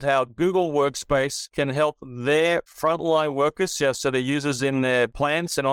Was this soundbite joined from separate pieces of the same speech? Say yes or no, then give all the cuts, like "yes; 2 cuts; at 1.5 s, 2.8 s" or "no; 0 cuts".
no; 0 cuts